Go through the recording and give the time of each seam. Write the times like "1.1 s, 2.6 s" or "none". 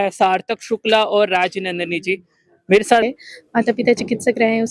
3.0 s